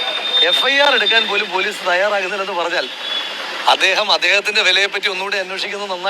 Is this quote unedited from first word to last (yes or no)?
yes